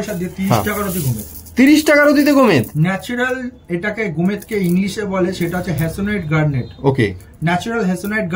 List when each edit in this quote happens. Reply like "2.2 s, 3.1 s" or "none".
none